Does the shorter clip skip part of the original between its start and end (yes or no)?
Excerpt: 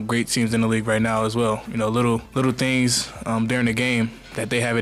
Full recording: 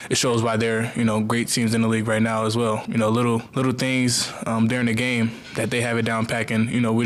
no